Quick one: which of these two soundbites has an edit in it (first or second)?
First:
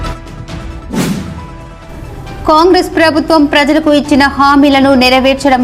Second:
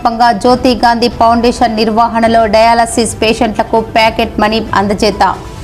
first